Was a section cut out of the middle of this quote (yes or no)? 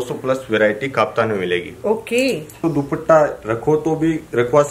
yes